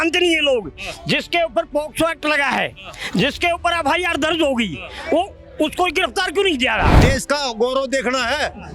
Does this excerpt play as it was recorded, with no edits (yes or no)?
no